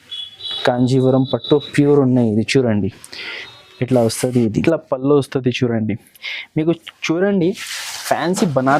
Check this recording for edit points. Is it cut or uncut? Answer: cut